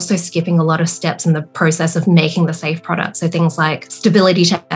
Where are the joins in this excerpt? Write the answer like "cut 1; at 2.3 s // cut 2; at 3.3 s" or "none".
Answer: cut 1; at 3.8 s